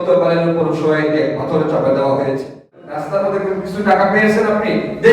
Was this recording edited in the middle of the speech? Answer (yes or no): yes